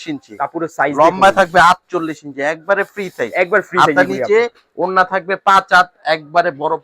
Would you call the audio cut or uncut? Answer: uncut